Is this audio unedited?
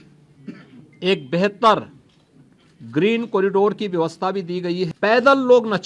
no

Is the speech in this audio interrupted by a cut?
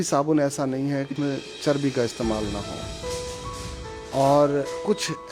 yes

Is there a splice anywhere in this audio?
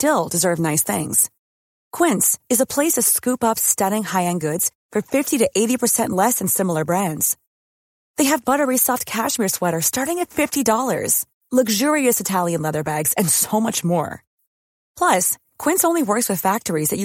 no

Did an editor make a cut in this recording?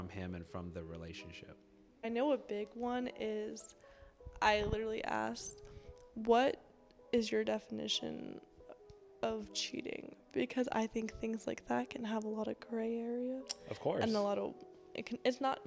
yes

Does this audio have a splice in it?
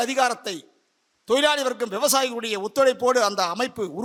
no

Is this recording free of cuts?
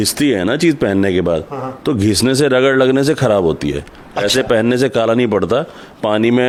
yes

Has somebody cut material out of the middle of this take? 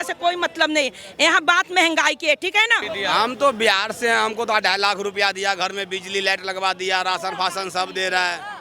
yes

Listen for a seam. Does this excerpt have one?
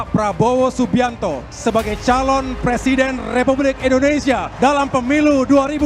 no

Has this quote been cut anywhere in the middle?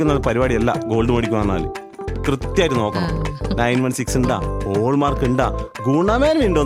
no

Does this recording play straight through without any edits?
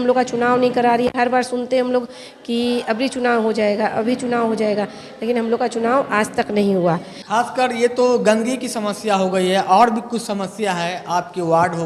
yes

